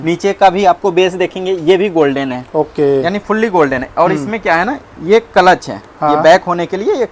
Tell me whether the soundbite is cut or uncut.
uncut